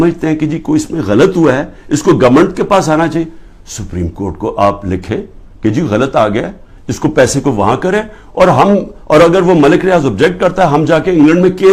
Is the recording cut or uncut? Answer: uncut